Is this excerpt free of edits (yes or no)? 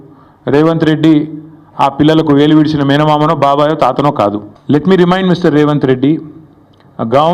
no